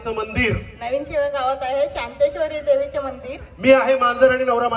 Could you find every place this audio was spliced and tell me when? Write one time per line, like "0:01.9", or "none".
none